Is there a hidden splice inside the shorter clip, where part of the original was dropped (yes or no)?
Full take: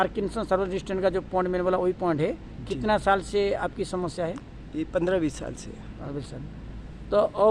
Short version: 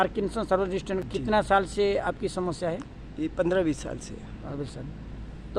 yes